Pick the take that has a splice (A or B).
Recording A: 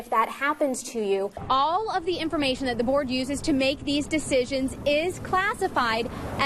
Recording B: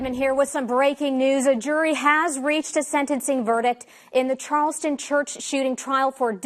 A